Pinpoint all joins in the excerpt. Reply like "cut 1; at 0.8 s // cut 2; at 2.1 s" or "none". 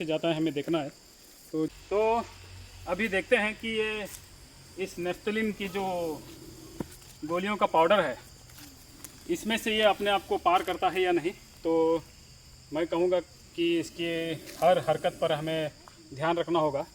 cut 1; at 1.7 s